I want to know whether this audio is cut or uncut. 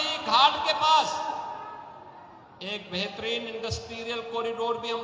uncut